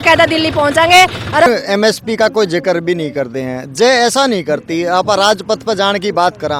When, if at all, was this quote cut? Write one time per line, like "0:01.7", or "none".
0:01.5